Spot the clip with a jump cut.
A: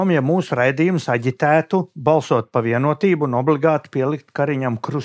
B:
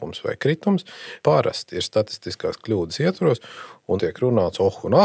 B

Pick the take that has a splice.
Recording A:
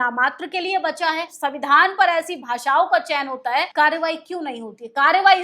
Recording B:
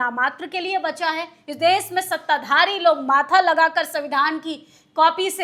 A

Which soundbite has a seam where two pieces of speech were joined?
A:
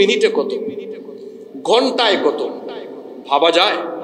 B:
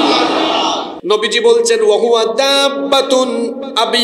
B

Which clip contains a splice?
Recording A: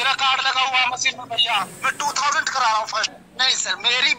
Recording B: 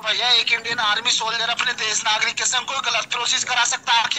A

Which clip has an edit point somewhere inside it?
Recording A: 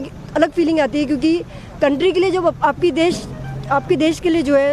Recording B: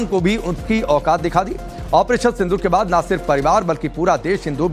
B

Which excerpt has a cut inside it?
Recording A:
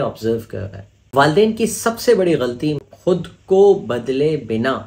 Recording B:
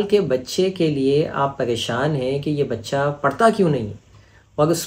A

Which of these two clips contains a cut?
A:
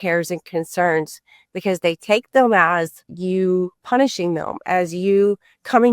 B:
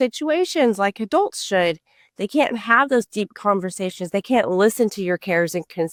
A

